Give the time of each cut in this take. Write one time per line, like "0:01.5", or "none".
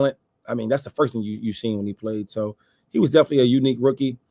none